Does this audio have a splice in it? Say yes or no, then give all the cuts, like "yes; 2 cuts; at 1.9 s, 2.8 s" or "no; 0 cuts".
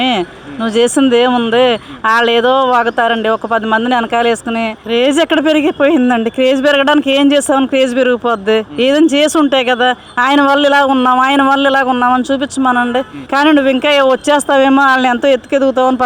yes; 2 cuts; at 4.8 s, 13.2 s